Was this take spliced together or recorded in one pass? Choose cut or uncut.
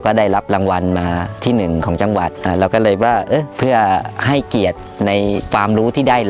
cut